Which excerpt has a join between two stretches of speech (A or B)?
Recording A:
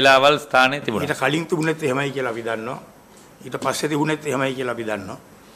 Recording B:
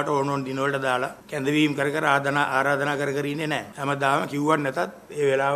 B